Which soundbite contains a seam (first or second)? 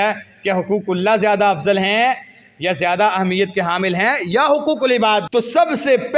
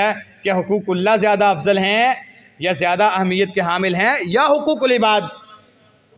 first